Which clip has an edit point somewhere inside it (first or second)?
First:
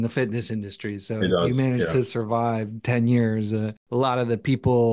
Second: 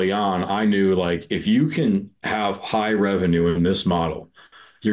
first